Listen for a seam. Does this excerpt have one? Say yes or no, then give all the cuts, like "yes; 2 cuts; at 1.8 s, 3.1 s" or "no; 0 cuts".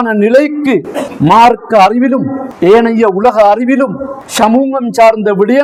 no; 0 cuts